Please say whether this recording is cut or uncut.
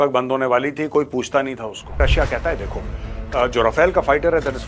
cut